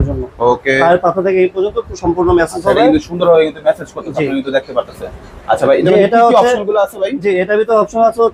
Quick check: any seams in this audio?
no; 0 cuts

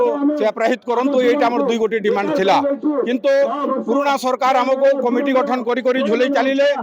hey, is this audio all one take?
yes; 0 cuts

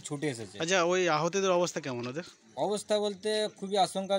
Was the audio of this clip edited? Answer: no; 0 cuts

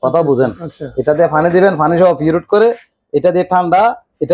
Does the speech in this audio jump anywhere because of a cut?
no; 0 cuts

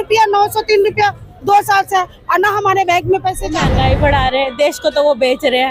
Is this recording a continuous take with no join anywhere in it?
no; 1 cut; at 3.6 s

